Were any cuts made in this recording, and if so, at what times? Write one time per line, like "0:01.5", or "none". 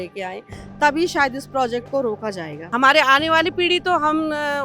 0:02.5